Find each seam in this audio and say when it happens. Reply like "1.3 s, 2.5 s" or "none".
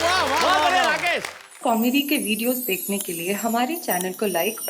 1.5 s